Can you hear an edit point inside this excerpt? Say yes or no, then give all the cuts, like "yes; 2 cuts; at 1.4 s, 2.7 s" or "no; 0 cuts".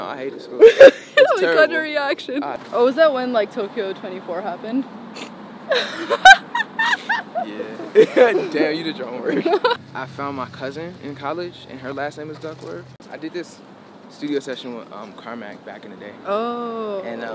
yes; 3 cuts; at 2.6 s, 9.8 s, 13.1 s